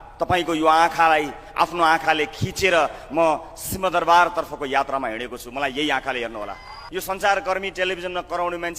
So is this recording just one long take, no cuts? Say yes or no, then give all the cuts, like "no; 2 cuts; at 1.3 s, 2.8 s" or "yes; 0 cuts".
no; 1 cut; at 6.8 s